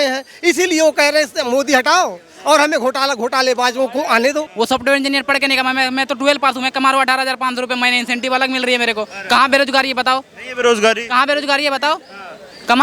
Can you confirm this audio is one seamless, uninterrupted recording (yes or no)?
no